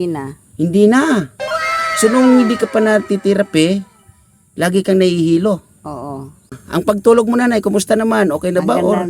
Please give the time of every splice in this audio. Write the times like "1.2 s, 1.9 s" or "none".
6.6 s